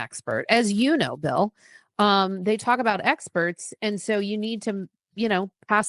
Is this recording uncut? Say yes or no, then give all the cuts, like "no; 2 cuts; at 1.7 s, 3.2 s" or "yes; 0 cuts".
yes; 0 cuts